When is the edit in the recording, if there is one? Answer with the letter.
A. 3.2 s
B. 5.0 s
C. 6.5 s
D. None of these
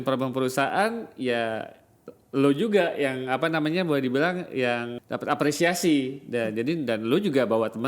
B